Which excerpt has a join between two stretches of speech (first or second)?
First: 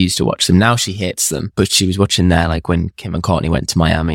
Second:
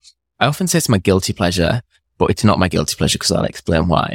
first